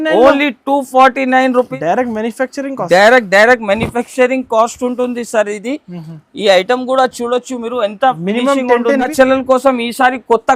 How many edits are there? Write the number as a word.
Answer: two